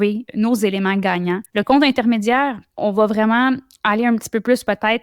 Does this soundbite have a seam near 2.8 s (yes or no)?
yes